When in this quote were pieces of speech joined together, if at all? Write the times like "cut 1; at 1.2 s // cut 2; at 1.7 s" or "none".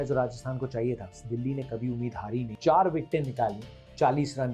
cut 1; at 1.2 s // cut 2; at 2.5 s